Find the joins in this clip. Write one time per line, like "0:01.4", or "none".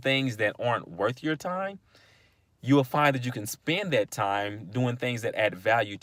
none

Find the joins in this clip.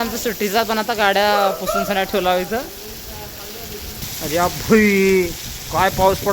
0:04.0

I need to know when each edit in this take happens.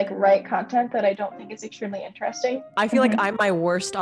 0:02.7

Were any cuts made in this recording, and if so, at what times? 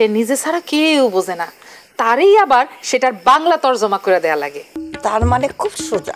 0:04.9

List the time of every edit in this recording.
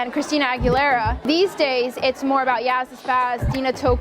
0:01.2

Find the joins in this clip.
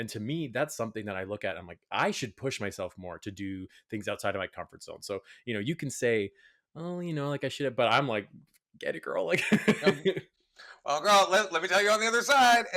none

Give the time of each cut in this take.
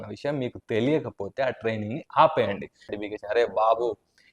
0:03.0

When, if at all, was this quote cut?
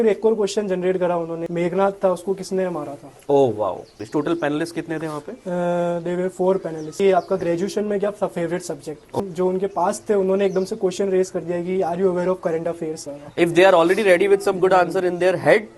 0:01.4
0:04.0
0:07.0
0:09.2
0:13.1

